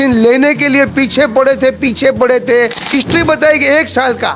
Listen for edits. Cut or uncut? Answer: cut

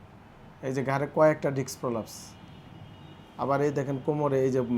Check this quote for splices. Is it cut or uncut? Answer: uncut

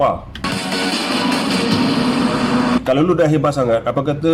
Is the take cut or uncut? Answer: uncut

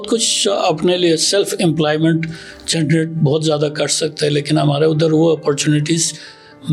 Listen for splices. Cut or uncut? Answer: uncut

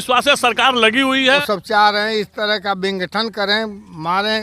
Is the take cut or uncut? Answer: cut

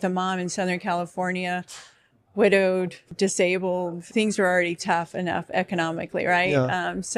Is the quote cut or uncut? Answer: cut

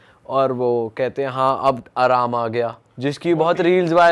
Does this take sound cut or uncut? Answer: uncut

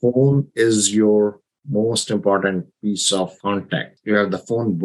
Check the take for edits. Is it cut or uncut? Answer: cut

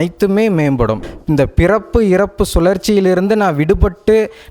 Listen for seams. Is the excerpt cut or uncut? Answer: cut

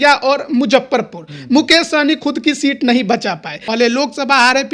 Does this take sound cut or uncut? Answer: cut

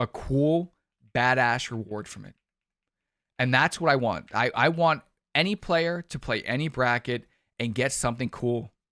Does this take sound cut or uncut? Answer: uncut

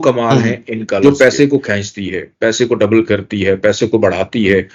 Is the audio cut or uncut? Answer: cut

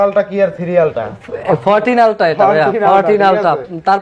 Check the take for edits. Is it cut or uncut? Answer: uncut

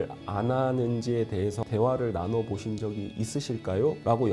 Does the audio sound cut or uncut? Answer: uncut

